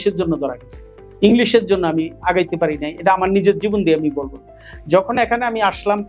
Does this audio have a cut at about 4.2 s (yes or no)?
no